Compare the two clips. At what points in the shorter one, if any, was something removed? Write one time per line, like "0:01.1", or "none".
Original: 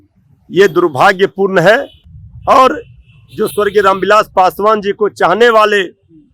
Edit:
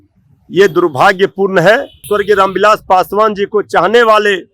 0:02.0